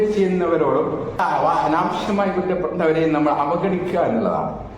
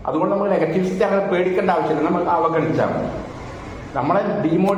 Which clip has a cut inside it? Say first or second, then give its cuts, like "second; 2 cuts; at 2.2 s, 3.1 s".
first; 1 cut; at 1.2 s